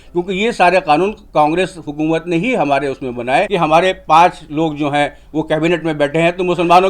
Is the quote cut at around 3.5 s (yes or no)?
yes